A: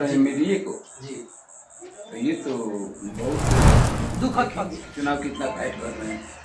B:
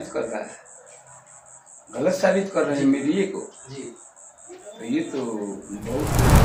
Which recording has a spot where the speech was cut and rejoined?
A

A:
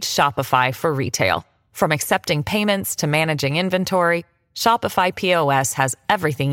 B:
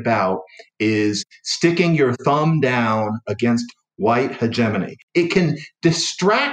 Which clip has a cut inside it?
B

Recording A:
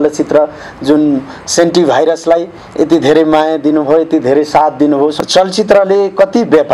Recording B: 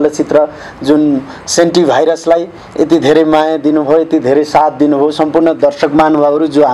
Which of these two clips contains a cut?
A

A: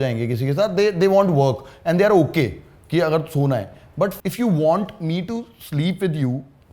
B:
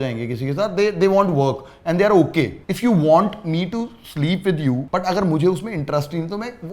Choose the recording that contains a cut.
B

